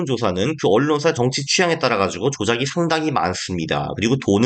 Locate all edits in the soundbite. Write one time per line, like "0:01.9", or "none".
0:01.2